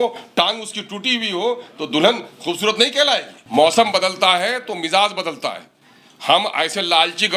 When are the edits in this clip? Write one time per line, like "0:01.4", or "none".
0:03.4